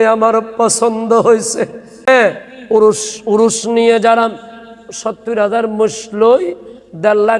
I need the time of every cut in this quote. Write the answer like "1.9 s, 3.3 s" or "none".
2.1 s